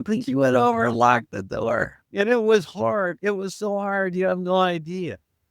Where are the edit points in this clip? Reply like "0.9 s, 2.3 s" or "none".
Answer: 2.0 s